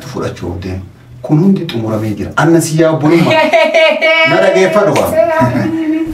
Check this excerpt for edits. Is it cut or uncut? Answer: uncut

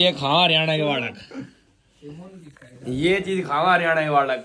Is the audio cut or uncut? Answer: uncut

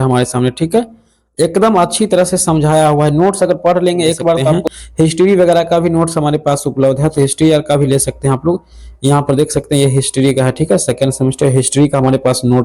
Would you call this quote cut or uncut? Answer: cut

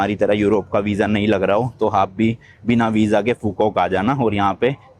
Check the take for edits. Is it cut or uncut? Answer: uncut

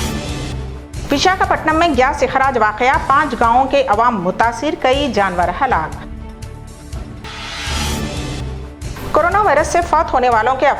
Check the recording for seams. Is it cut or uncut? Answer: cut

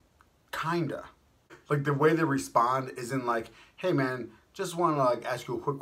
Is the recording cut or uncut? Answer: cut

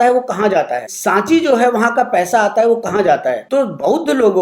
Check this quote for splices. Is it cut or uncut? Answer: cut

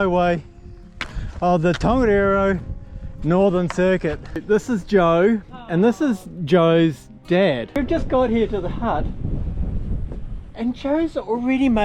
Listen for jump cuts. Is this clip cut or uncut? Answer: cut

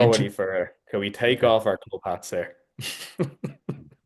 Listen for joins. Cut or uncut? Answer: uncut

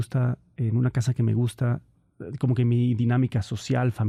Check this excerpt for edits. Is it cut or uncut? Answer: uncut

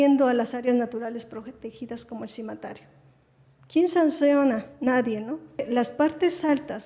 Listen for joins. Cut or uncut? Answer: cut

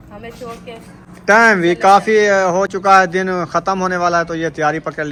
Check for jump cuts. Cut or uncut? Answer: uncut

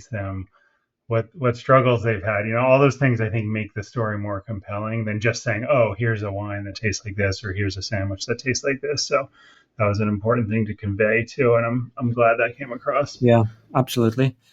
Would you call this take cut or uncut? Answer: cut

